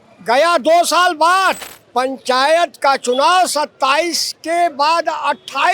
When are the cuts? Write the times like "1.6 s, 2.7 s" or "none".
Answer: 1.7 s